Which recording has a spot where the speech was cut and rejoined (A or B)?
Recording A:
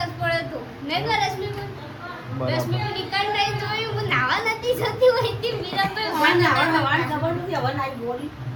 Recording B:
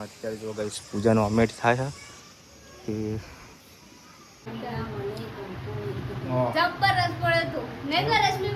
B